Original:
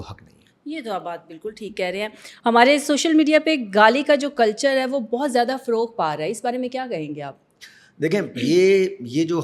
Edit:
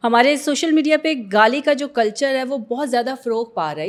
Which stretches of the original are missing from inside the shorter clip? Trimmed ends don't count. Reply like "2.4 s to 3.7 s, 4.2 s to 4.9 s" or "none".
none